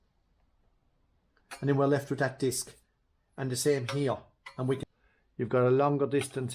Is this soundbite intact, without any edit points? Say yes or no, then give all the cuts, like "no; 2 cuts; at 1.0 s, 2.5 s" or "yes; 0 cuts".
no; 1 cut; at 4.9 s